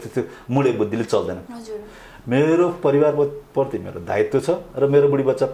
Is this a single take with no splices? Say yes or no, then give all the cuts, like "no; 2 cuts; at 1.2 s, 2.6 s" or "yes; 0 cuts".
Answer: no; 1 cut; at 1.4 s